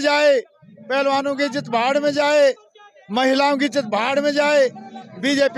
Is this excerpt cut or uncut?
uncut